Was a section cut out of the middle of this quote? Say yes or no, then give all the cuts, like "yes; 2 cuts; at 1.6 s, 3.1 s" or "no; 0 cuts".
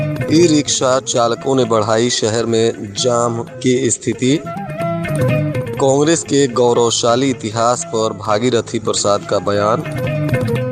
no; 0 cuts